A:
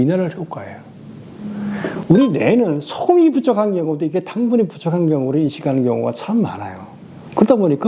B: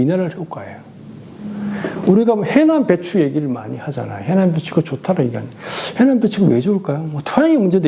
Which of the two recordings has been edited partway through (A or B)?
A